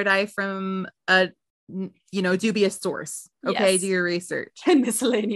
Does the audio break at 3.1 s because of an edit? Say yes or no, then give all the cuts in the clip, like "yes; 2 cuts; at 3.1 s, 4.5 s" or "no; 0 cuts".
no; 1 cut; at 4.4 s